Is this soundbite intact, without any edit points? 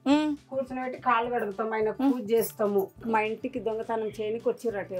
no; 1 cut; at 3.0 s

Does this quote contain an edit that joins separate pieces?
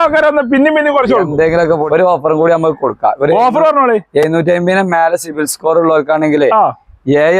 yes; 1 cut; at 1.8 s

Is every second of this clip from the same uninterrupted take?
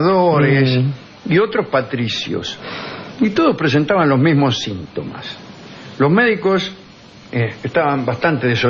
yes; 0 cuts

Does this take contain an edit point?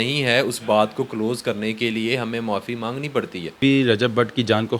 yes; 1 cut; at 3.6 s

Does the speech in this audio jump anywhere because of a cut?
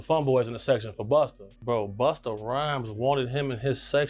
yes; 1 cut; at 1.5 s

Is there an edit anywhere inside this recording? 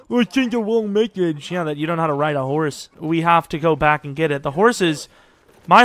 yes; 1 cut; at 2.9 s

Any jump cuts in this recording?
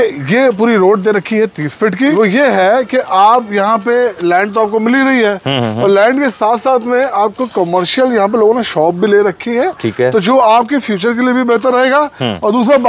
yes; 1 cut; at 2.1 s

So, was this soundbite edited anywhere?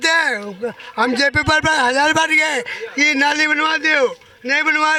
no; 0 cuts

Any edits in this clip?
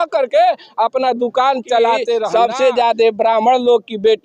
yes; 1 cut; at 2.3 s

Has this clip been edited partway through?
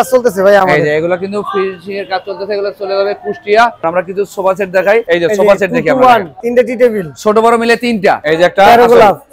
yes; 3 cuts; at 3.8 s, 6.4 s, 8.2 s

